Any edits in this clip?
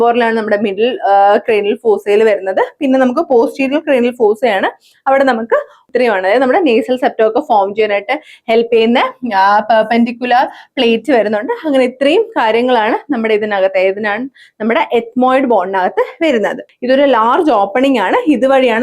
yes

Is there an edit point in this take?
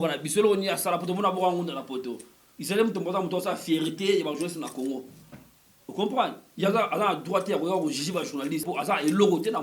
yes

